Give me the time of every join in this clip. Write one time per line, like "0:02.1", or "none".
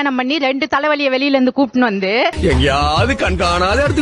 0:02.3